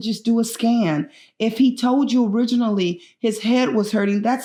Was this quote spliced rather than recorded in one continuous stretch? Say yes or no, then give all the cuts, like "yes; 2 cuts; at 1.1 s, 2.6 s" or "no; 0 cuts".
no; 0 cuts